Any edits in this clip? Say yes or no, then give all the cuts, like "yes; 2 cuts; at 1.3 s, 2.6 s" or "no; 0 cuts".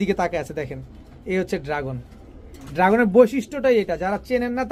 no; 0 cuts